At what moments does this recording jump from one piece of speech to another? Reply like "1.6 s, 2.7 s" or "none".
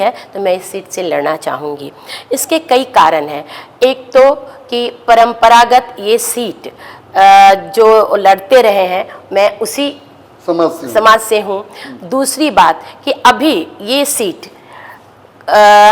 none